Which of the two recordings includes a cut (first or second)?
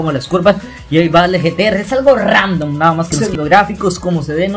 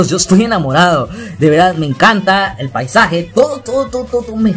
first